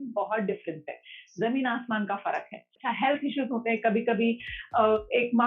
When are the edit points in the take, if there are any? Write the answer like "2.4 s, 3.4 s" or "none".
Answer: 2.8 s